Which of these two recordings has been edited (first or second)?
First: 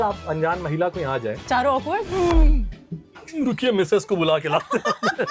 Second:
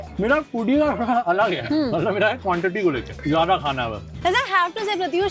second